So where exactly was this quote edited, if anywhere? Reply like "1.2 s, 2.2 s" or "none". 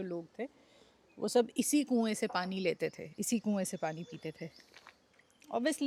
none